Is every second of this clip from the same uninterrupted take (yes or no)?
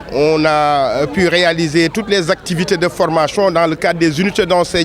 yes